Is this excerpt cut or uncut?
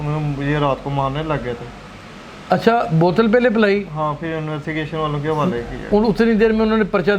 uncut